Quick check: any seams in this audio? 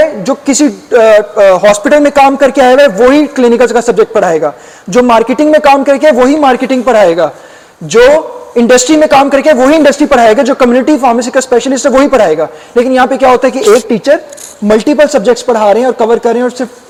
no; 0 cuts

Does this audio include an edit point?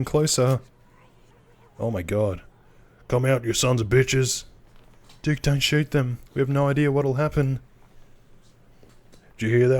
no; 0 cuts

